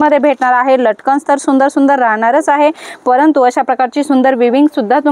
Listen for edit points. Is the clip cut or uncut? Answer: uncut